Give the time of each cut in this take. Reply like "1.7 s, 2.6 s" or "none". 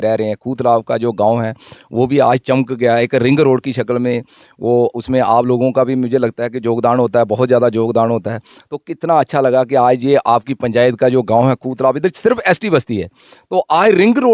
none